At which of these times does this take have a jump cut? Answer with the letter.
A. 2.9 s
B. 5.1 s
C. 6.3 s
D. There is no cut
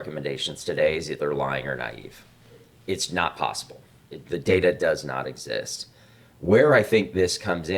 D